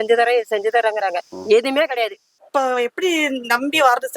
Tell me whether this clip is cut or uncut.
cut